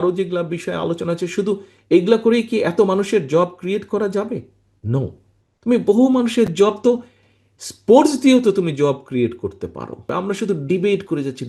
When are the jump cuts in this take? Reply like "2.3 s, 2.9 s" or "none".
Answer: 10.1 s